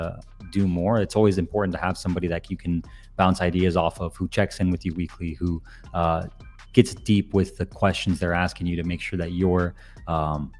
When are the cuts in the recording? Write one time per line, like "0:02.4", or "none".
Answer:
none